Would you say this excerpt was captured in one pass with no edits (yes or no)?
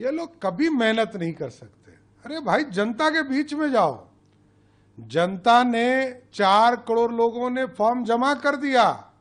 yes